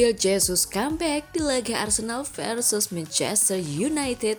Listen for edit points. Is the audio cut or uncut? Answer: uncut